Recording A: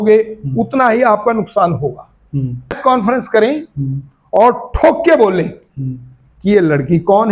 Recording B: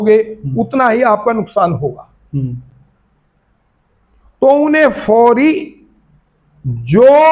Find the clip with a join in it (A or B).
A